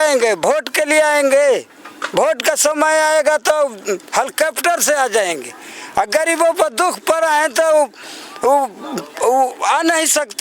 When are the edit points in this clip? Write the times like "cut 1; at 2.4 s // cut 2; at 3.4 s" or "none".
none

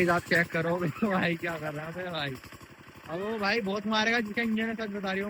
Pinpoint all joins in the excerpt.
none

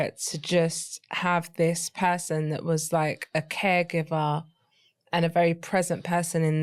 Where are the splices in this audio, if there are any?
none

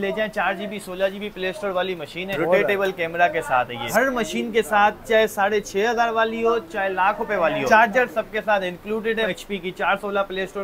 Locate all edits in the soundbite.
cut 1; at 2.3 s // cut 2; at 3.9 s // cut 3; at 7.6 s // cut 4; at 9.3 s

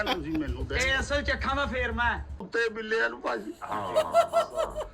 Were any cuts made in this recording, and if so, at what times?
cut 1; at 2.5 s

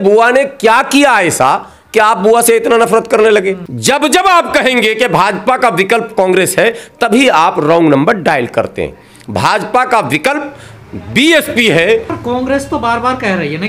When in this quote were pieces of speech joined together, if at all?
cut 1; at 3.7 s // cut 2; at 12.1 s

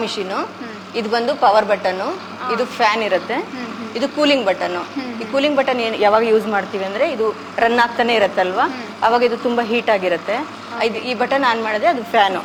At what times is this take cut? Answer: none

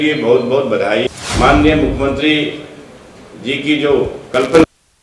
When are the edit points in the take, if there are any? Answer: cut 1; at 1.2 s

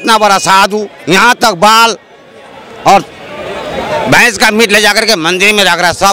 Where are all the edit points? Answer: none

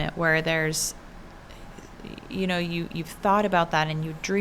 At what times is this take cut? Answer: none

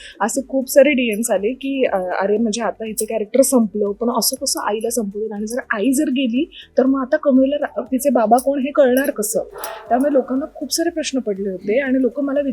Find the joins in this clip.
none

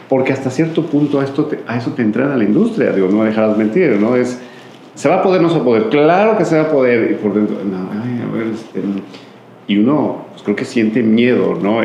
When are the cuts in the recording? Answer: none

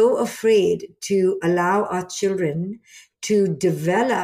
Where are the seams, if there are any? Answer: none

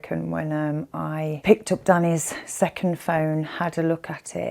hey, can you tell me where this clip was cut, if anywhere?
cut 1; at 1.4 s

